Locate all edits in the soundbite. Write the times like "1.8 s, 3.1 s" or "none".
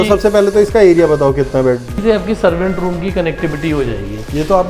2.0 s